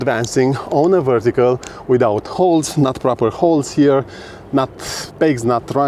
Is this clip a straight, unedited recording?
yes; 0 cuts

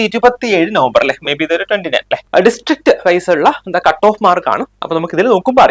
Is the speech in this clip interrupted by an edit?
yes; 1 cut; at 2.2 s

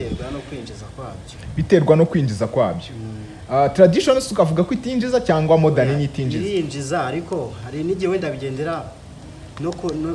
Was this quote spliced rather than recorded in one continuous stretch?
no; 0 cuts

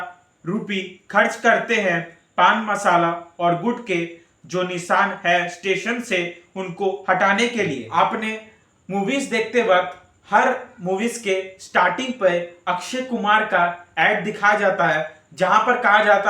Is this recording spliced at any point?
yes; 1 cut; at 7.8 s

